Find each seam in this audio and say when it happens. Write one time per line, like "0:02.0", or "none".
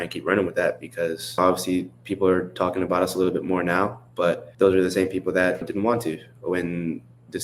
0:01.4
0:04.5
0:05.7